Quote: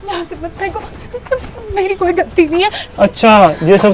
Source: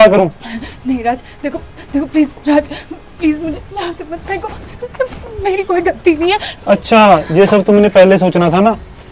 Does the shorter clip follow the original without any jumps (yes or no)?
yes